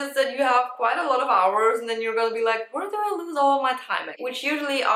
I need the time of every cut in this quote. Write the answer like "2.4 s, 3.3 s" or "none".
none